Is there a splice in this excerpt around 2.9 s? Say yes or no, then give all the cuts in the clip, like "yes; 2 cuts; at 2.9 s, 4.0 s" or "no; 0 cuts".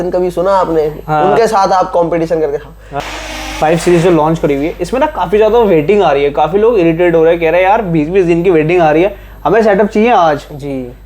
yes; 1 cut; at 2.9 s